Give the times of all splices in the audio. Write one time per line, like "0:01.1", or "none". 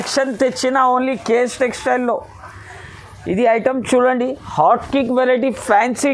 none

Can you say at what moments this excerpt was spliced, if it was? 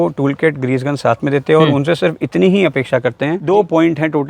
0:03.4

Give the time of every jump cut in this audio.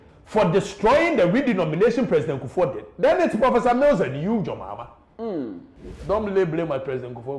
0:05.9

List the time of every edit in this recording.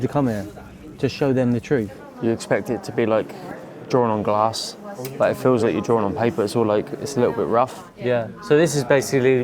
0:02.0
0:07.8

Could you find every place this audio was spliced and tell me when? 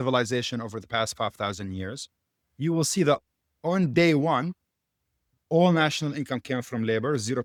none

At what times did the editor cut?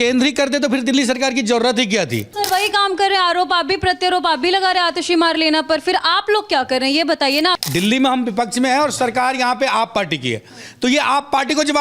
0:02.3
0:07.6

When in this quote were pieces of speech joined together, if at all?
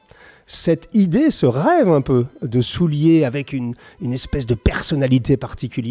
none

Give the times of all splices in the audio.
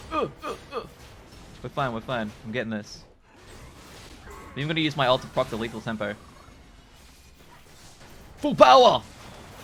none

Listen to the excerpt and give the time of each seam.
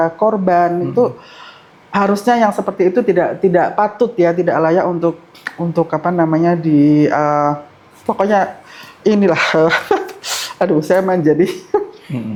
none

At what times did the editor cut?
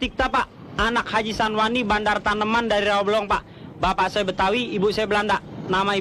none

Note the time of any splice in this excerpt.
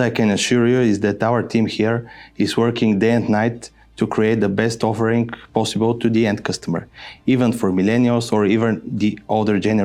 none

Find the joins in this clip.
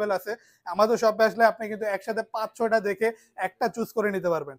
none

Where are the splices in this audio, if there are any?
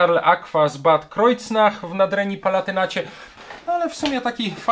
0:03.3

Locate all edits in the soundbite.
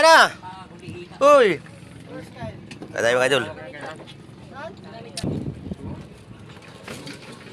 0:05.2

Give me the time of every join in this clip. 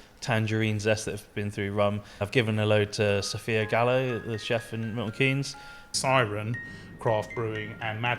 0:02.1
0:05.8

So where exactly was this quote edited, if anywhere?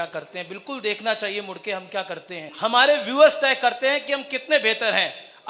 0:02.5

